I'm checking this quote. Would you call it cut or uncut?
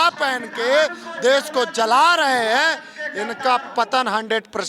uncut